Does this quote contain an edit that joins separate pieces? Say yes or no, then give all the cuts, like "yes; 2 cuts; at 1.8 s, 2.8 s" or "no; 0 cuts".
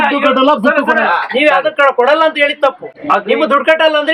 no; 0 cuts